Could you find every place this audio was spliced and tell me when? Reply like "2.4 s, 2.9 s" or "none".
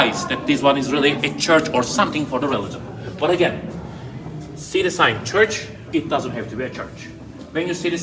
none

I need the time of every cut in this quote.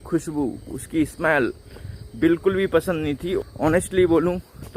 3.4 s

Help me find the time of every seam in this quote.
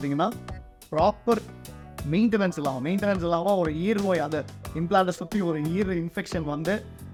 none

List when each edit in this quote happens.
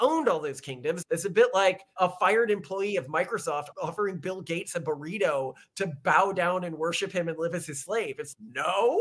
1.0 s, 1.9 s, 3.7 s

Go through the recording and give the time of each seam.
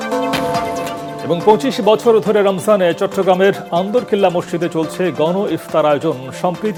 none

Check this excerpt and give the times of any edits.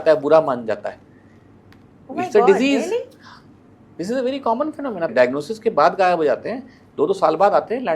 5.1 s

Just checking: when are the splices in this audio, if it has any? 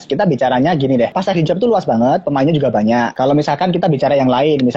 1.2 s, 3.1 s

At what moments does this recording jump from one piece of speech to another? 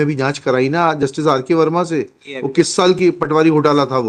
none

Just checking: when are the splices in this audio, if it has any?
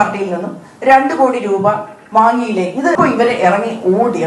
2.9 s

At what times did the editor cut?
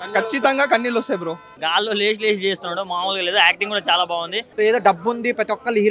1.5 s, 4.4 s

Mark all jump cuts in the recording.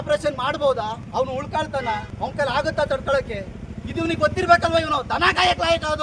1.0 s, 2.1 s

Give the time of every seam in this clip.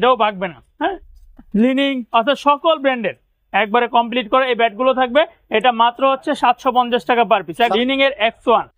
1.1 s, 7.7 s

